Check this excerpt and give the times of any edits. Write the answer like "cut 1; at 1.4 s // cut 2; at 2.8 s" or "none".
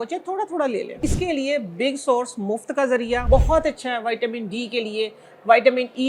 cut 1; at 1.0 s // cut 2; at 3.2 s